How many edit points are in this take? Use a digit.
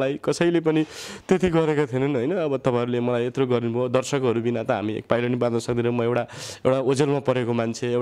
0